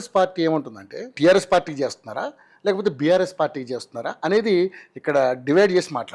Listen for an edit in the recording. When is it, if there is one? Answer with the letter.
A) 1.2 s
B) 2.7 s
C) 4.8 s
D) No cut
A